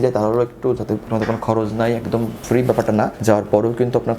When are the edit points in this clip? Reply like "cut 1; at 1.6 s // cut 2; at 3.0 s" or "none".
cut 1; at 1.1 s